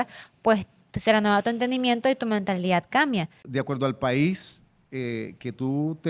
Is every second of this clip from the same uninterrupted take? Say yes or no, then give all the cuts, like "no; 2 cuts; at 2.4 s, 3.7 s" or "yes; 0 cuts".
no; 1 cut; at 3.4 s